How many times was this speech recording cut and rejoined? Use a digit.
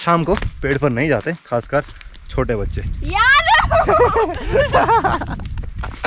0